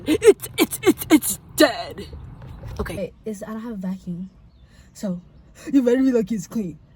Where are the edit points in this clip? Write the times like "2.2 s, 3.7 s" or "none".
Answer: 3.0 s